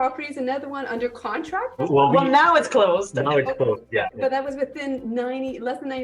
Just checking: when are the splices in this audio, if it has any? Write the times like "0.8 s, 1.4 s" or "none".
1.8 s, 4.1 s